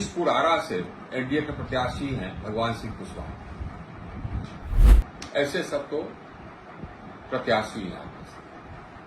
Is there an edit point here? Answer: yes; 1 cut; at 4.8 s

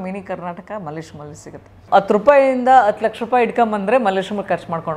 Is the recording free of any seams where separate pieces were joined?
no; 1 cut; at 1.7 s

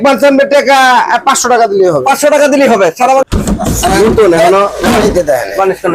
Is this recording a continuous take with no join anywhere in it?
no; 1 cut; at 3.2 s

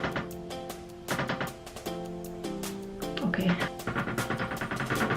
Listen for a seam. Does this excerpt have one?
yes; 1 cut; at 3.7 s

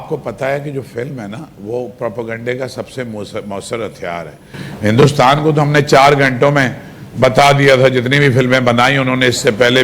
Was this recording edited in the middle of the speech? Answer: yes; 1 cut; at 4.6 s

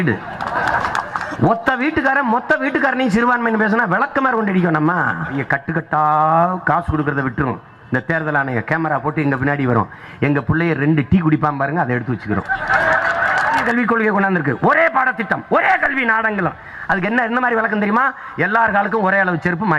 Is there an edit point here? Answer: yes; 2 cuts; at 5.4 s, 13.6 s

